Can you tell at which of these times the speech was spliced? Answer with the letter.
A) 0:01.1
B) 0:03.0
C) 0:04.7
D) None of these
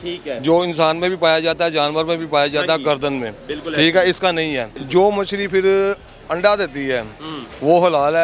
C